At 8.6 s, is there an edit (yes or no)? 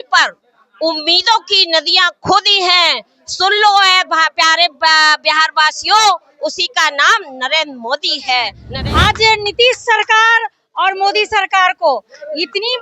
yes